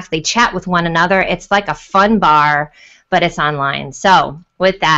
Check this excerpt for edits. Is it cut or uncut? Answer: uncut